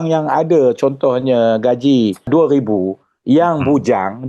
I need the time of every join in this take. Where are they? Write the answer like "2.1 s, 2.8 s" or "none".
2.3 s